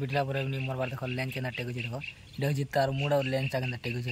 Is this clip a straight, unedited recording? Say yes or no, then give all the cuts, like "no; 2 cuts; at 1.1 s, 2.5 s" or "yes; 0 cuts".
yes; 0 cuts